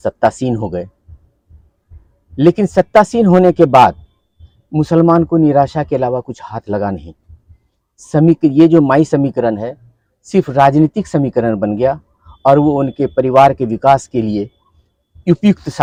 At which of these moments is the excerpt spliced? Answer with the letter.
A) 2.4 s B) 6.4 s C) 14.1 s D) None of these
D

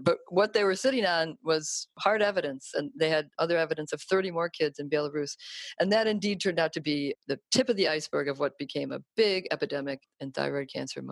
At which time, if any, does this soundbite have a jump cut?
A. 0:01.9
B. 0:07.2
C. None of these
A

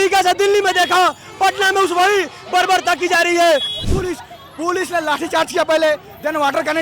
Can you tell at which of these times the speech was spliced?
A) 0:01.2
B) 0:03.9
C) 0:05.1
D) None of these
B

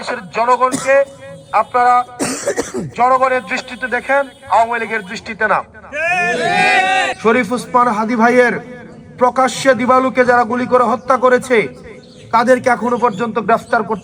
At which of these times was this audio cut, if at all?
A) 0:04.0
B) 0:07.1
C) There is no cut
B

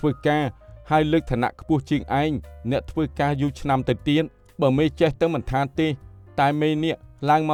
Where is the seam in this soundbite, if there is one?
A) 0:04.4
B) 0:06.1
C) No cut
C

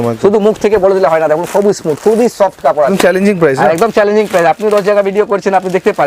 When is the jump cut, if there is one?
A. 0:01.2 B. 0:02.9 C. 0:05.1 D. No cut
B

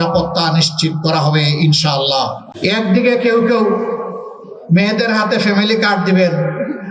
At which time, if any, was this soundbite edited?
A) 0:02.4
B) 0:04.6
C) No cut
A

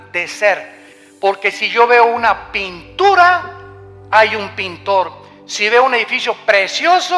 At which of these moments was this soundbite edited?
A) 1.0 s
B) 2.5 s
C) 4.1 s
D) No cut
A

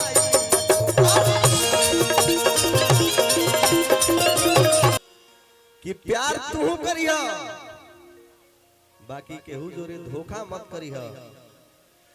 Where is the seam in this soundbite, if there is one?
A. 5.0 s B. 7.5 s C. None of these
A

